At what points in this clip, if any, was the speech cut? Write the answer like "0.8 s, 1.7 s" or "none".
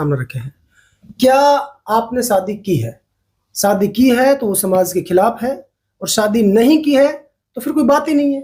none